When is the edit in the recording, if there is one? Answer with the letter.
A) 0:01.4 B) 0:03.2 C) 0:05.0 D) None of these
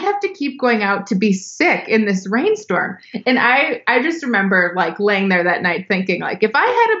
D